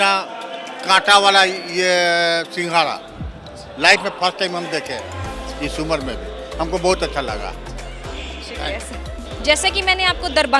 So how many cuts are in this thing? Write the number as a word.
zero